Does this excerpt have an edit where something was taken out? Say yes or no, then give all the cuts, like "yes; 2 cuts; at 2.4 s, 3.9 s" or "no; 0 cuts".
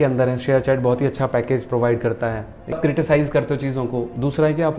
yes; 1 cut; at 2.8 s